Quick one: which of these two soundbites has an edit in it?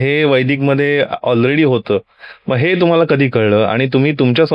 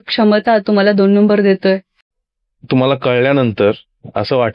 second; 1 cut; at 1.9 s

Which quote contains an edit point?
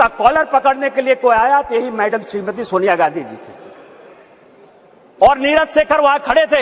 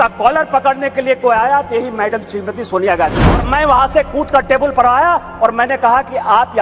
second; 1 cut; at 3.4 s

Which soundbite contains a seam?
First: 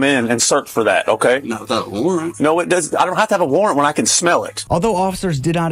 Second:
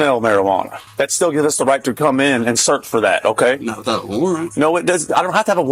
first; 1 cut; at 4.6 s

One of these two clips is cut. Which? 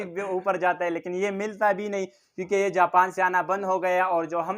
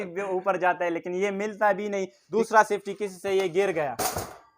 second; 1 cut; at 2.2 s

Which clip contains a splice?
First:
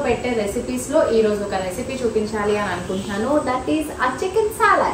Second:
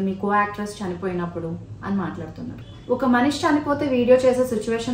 second; 1 cut; at 2.7 s

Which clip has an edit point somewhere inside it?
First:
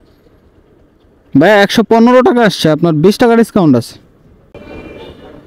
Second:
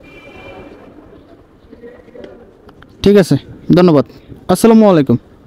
first; 1 cut; at 4.5 s

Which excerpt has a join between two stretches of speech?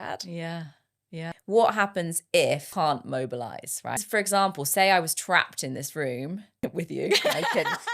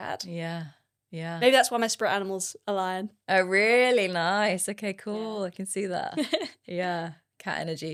first; 4 cuts; at 1.3 s, 2.7 s, 4.0 s, 6.5 s

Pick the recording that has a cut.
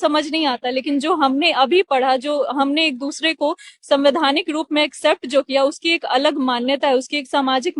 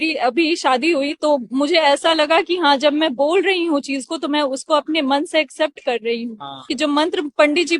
second; 1 cut; at 6.7 s

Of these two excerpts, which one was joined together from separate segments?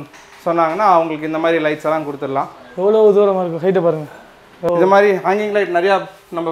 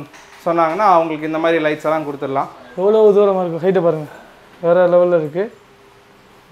first; 1 cut; at 4.5 s

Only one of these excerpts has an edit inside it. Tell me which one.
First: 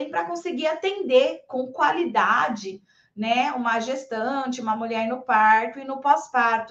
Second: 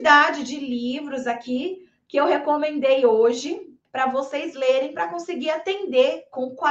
second; 1 cut; at 3.7 s

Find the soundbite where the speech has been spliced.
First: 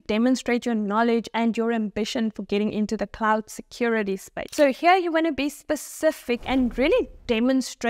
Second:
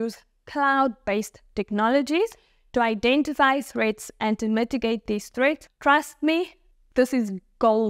first; 1 cut; at 4.5 s

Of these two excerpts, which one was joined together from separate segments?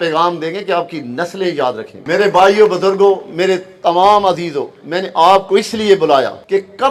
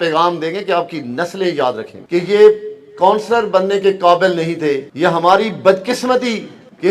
second; 1 cut; at 2.0 s

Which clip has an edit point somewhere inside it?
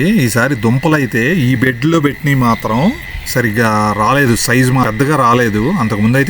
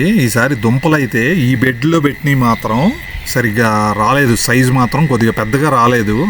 first; 1 cut; at 4.9 s

